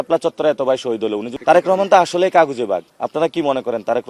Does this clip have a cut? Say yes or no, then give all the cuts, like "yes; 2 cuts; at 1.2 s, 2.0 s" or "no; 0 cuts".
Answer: yes; 2 cuts; at 1.3 s, 2.9 s